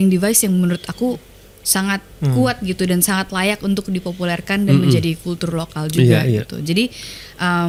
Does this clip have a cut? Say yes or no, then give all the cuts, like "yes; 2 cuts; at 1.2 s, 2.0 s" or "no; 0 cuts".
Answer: no; 0 cuts